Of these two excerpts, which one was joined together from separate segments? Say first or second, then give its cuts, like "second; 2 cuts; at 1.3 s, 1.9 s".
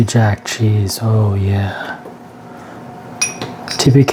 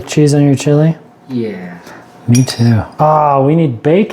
second; 1 cut; at 3.0 s